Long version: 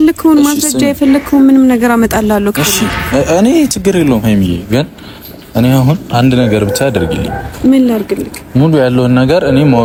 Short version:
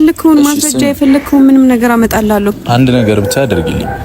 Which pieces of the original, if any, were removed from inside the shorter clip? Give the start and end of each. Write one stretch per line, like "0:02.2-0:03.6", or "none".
0:02.6-0:06.0